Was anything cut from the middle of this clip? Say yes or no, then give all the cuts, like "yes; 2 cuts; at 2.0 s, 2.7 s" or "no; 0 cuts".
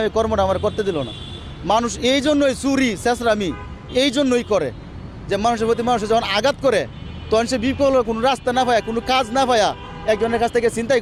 no; 0 cuts